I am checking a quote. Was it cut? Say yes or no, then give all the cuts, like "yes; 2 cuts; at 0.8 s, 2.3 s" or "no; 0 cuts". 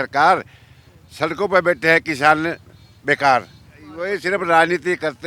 yes; 1 cut; at 4.0 s